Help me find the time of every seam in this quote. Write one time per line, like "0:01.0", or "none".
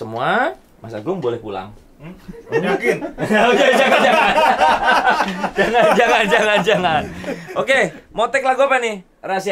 none